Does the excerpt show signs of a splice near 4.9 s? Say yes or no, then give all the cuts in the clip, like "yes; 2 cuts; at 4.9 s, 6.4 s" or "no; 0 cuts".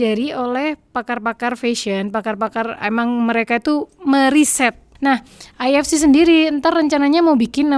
yes; 1 cut; at 4.9 s